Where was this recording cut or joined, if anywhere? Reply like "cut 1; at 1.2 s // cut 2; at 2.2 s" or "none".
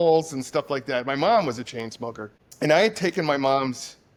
none